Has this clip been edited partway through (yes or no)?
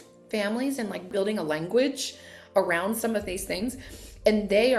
yes